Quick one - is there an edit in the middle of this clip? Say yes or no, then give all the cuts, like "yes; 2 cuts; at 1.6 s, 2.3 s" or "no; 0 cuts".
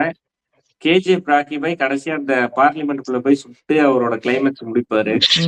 no; 0 cuts